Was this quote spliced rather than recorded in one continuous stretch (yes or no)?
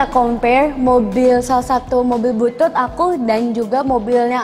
no